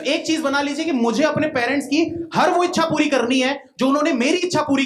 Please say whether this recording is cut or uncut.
uncut